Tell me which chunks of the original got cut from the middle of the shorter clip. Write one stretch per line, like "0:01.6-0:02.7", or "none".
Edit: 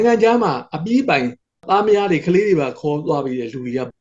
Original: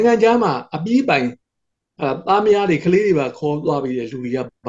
0:01.6-0:02.2